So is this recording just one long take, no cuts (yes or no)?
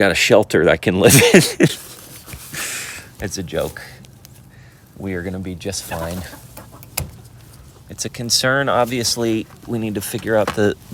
yes